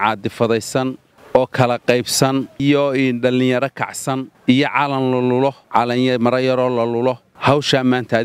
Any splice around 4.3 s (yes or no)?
yes